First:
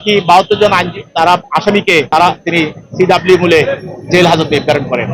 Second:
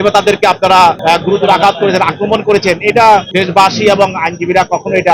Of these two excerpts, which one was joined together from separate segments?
second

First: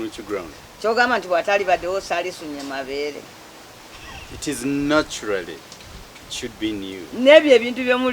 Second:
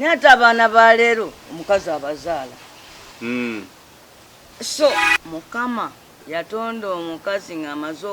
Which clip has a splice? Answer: second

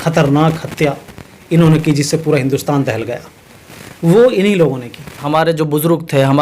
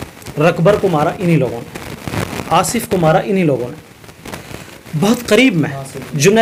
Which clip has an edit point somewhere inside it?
first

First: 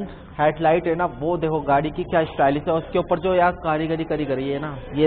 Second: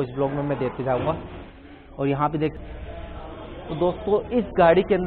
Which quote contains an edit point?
second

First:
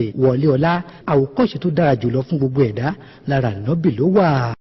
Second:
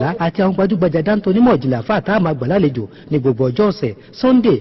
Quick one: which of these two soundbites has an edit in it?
first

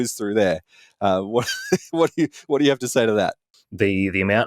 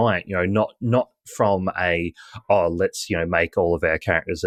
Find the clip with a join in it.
first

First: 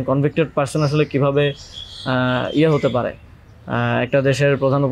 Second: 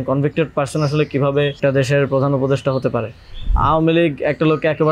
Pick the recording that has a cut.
second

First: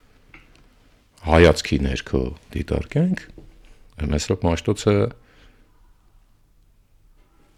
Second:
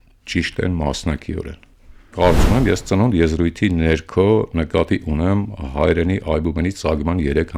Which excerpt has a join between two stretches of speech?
second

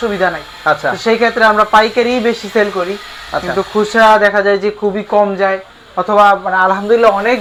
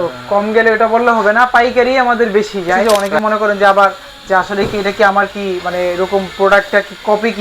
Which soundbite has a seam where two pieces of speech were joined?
second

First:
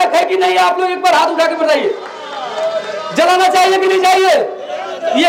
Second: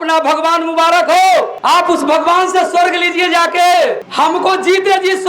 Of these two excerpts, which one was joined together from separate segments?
second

